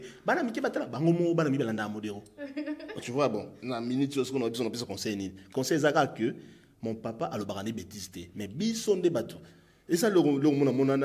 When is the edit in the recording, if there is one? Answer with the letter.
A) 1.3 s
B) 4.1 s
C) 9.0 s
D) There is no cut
D